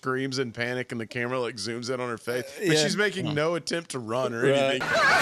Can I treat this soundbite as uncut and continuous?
yes; 0 cuts

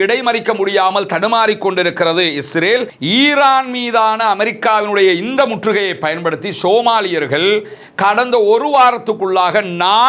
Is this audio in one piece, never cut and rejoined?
no; 1 cut; at 2.9 s

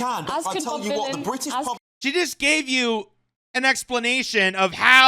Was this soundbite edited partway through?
yes; 1 cut; at 1.9 s

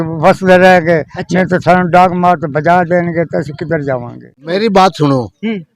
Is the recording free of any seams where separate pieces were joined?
no; 1 cut; at 4.5 s

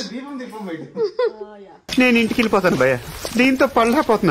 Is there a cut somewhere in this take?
yes; 2 cuts; at 1.8 s, 3.1 s

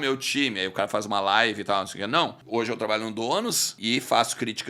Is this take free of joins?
no; 2 cuts; at 2.4 s, 3.7 s

